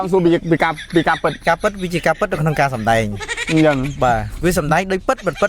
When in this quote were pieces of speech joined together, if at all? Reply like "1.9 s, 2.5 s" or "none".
1.4 s